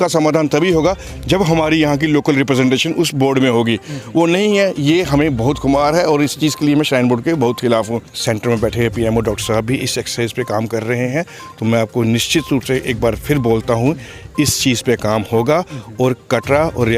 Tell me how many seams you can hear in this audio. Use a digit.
1